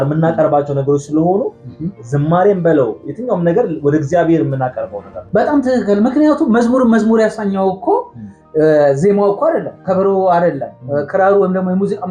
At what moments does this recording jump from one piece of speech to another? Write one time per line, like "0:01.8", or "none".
none